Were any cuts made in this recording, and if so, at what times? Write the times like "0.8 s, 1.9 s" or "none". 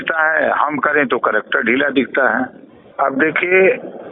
2.8 s